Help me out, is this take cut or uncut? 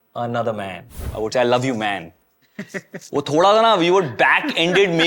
cut